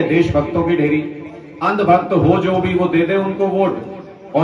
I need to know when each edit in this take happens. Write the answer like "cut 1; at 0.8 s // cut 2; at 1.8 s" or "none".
none